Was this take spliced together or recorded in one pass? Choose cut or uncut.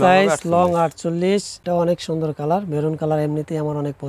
cut